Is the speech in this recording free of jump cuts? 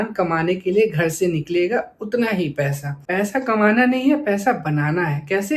no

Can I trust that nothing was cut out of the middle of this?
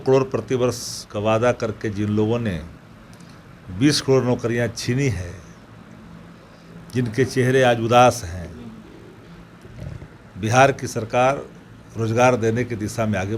yes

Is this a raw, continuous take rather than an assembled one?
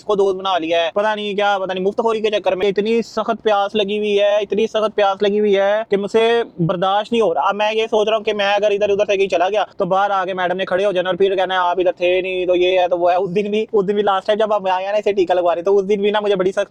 yes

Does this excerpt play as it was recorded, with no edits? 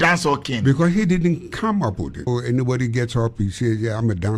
no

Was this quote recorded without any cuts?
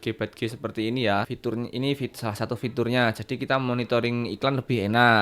no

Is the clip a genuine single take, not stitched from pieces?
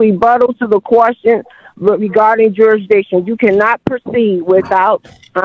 yes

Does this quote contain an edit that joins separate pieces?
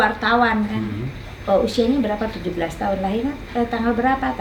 no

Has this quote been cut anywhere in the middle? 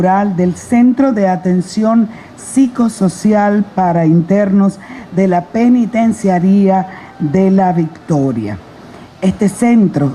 no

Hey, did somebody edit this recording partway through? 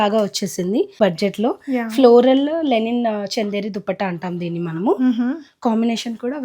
yes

